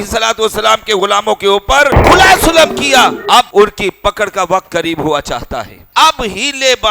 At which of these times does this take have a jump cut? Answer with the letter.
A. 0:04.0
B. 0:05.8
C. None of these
B